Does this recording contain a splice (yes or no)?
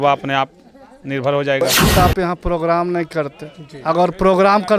yes